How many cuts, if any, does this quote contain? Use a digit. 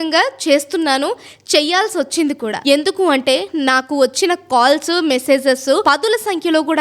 2